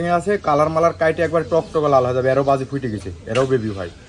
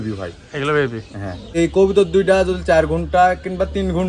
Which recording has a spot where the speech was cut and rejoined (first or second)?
second